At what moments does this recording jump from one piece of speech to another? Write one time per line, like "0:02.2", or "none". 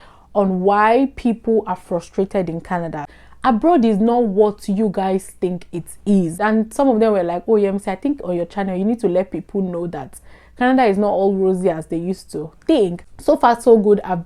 0:03.0
0:06.3
0:13.1